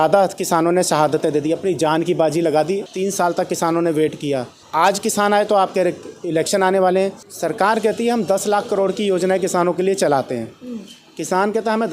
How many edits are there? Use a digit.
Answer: 3